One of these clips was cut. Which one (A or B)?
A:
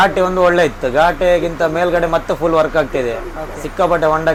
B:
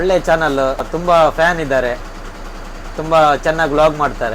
B